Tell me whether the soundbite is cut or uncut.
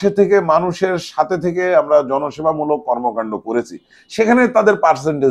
uncut